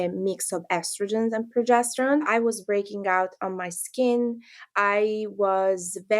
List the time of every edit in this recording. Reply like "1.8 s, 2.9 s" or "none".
2.3 s